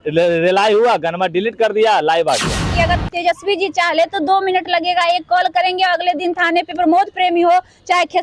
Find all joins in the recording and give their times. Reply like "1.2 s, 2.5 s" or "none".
2.7 s